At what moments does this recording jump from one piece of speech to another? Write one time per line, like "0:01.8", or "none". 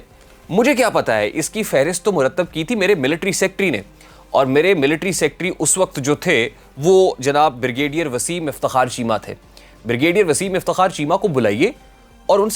none